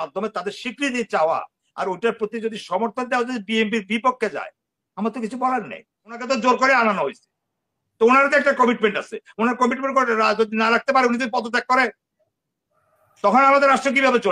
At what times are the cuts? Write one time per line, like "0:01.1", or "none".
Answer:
0:06.2